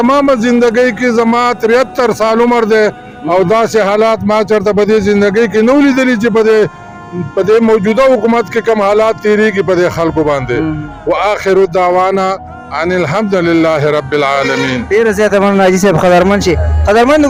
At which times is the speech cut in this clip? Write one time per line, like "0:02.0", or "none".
none